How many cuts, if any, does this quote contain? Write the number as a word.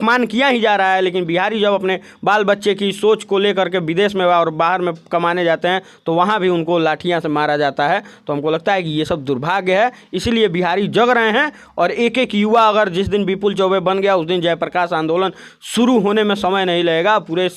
zero